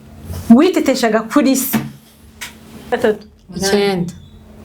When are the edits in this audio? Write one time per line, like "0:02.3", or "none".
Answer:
0:02.9